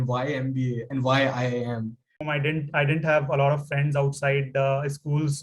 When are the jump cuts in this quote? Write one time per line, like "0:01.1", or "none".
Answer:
0:02.3